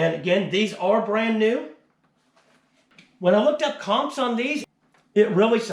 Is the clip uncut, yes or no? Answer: no